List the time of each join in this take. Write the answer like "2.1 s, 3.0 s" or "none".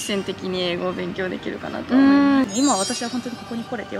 2.5 s